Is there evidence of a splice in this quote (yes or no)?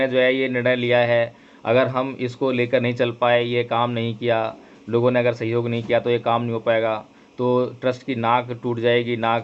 no